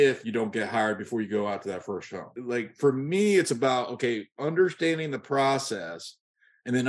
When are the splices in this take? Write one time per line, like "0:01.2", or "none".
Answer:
0:02.3